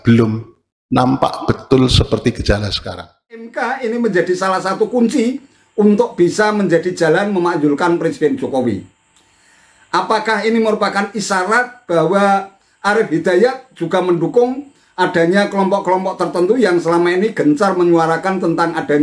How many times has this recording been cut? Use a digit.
1